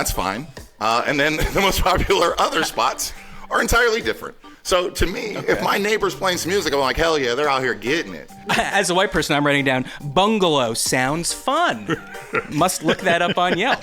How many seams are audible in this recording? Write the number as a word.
two